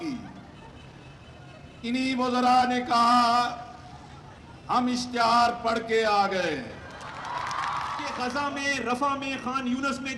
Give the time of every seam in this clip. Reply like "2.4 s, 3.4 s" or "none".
8.1 s